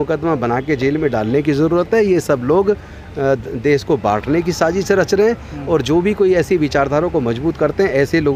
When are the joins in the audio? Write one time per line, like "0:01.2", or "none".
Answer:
none